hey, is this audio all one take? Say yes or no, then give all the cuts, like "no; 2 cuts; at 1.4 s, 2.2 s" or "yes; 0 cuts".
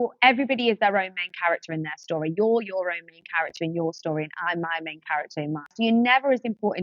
no; 1 cut; at 5.7 s